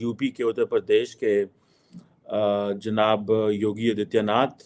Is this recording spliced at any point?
no; 0 cuts

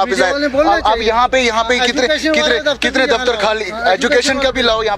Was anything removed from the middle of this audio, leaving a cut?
no; 0 cuts

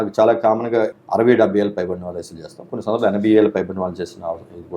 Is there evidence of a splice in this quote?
yes; 1 cut; at 1.0 s

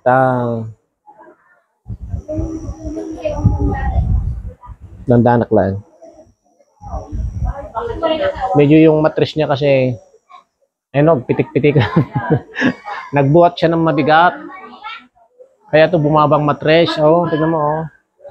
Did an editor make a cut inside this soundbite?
no; 0 cuts

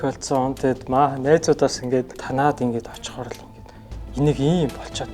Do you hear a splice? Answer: yes; 1 cut; at 2.2 s

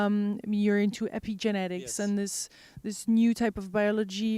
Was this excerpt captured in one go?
no; 1 cut; at 3.1 s

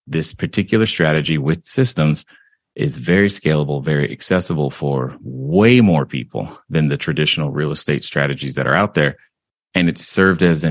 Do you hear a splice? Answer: no; 0 cuts

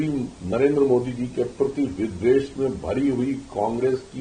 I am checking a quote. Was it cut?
no; 0 cuts

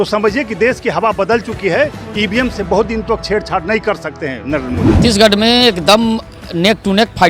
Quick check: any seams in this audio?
yes; 1 cut; at 5.0 s

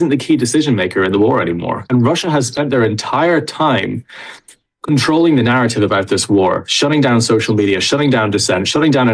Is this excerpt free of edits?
no; 1 cut; at 1.9 s

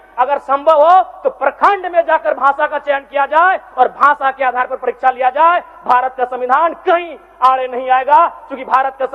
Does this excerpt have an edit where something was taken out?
no; 0 cuts

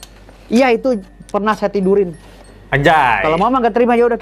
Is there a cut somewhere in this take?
no; 0 cuts

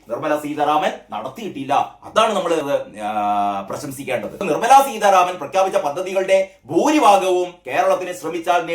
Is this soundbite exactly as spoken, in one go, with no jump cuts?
no; 2 cuts; at 2.6 s, 4.4 s

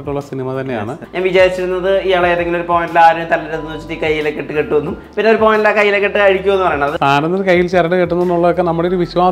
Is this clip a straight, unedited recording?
no; 2 cuts; at 1.0 s, 6.9 s

